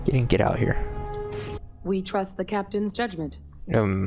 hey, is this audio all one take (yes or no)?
no